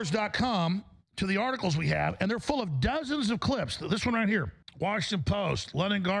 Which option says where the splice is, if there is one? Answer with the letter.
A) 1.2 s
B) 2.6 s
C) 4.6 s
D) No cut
C